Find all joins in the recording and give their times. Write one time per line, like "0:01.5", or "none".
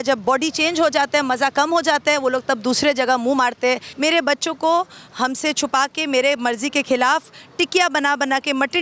0:03.9